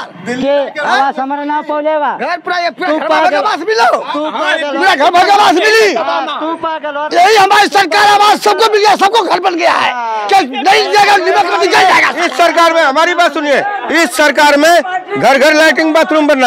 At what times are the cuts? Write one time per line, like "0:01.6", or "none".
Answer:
none